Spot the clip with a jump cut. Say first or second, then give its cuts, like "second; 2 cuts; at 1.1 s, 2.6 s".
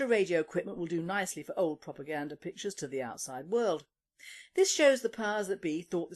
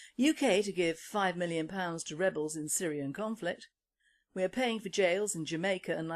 second; 1 cut; at 1.2 s